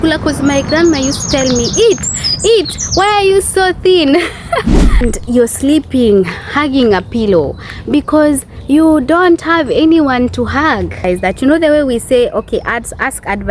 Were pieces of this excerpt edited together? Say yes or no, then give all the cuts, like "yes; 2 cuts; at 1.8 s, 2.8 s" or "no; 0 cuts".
yes; 2 cuts; at 5.0 s, 11.0 s